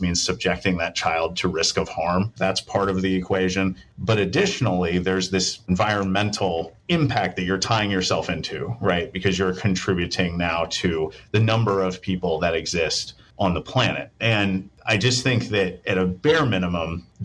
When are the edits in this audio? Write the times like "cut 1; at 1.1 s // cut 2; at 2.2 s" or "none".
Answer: none